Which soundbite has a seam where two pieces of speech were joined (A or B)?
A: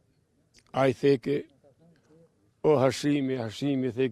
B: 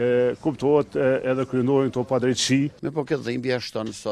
B